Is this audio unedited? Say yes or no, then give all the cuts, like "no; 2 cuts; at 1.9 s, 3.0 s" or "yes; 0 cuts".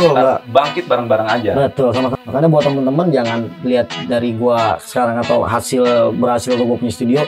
no; 1 cut; at 2.1 s